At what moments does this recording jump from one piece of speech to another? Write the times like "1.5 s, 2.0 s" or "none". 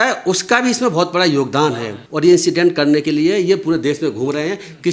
2.0 s